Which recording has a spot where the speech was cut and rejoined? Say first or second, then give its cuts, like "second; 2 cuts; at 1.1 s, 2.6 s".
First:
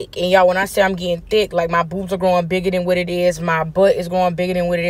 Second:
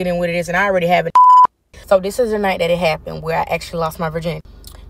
second; 1 cut; at 1.7 s